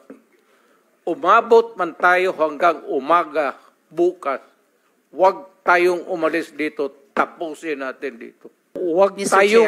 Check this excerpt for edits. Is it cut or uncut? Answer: cut